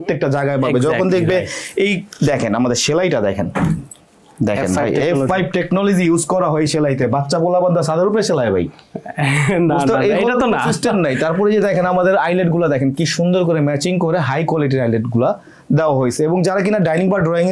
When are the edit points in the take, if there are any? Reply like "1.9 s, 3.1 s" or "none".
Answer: none